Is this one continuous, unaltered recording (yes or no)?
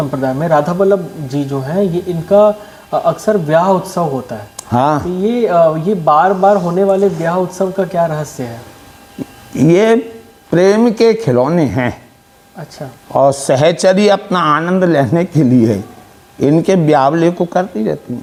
yes